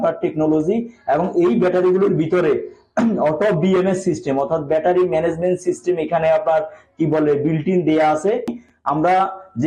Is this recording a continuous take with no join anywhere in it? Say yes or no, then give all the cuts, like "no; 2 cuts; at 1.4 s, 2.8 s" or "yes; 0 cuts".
no; 1 cut; at 8.6 s